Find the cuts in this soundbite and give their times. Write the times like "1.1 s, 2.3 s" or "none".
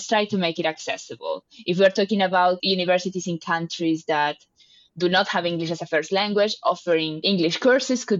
none